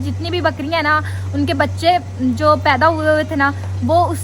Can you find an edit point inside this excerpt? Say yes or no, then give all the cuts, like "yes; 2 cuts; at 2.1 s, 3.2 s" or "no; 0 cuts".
no; 0 cuts